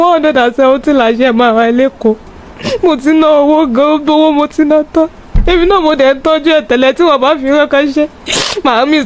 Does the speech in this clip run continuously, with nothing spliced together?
yes; 0 cuts

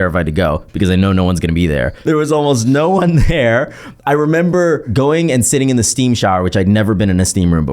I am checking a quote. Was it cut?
yes; 2 cuts; at 1.9 s, 4.9 s

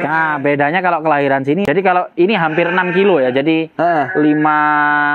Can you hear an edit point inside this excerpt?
yes; 1 cut; at 1.6 s

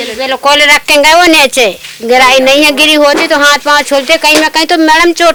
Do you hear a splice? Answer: no; 0 cuts

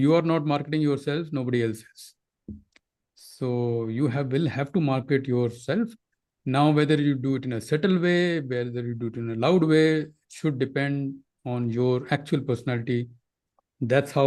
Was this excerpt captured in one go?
yes; 0 cuts

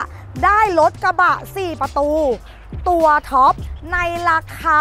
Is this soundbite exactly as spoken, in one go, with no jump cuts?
no; 1 cut; at 3.7 s

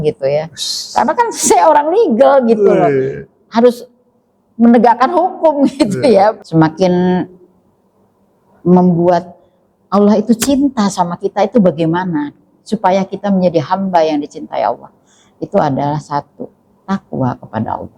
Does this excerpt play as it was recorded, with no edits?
no; 1 cut; at 6.4 s

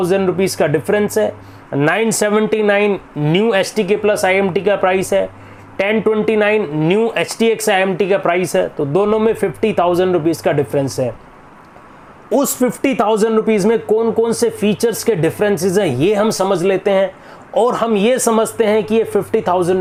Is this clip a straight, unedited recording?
yes; 0 cuts

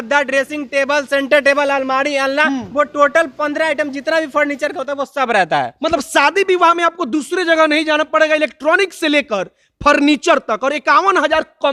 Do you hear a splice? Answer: no; 0 cuts

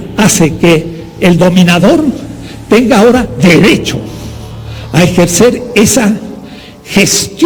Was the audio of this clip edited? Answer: no; 0 cuts

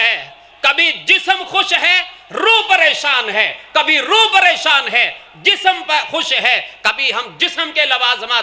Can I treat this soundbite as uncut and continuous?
yes; 0 cuts

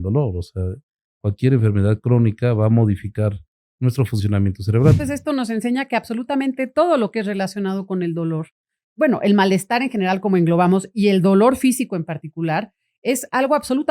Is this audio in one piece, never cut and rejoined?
no; 1 cut; at 5.0 s

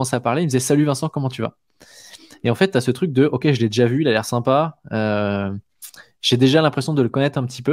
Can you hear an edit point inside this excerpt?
no; 0 cuts

